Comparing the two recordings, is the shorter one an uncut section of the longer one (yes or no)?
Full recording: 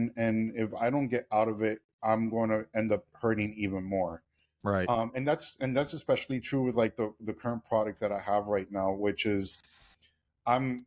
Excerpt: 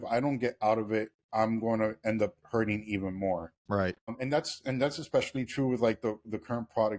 no